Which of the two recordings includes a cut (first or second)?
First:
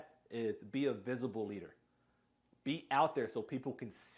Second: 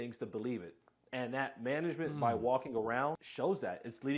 second